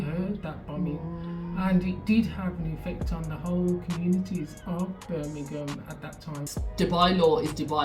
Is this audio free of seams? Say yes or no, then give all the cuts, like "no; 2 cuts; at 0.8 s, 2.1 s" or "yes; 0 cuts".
no; 1 cut; at 6.5 s